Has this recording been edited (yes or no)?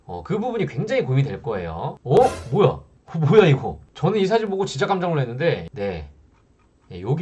no